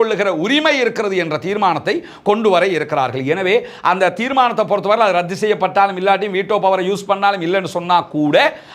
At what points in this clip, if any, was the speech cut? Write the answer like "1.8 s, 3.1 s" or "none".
none

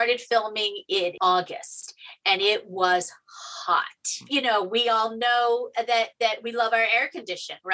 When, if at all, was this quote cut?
4.2 s

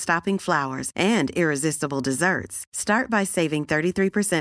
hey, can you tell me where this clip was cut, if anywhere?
none

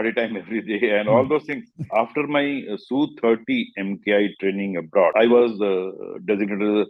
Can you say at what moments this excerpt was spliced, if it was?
1.9 s, 5.1 s

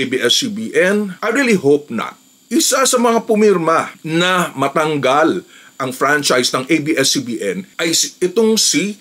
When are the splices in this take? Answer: 1.1 s, 2.4 s

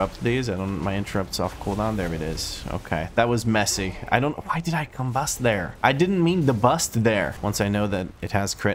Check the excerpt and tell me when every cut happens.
7.4 s

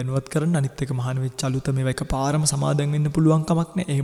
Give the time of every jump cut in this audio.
none

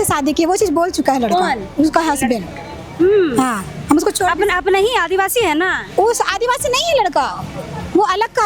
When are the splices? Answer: none

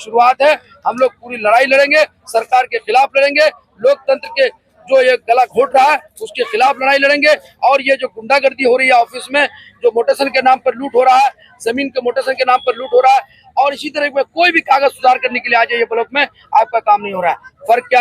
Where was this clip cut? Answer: none

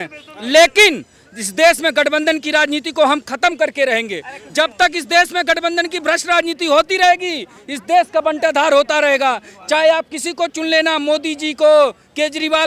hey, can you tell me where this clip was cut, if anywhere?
none

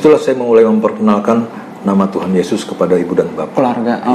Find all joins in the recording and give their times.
none

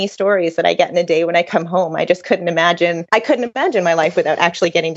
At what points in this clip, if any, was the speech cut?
3.4 s

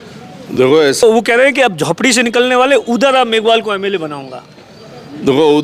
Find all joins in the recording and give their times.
1.0 s

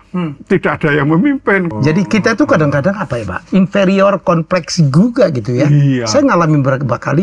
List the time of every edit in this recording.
1.7 s

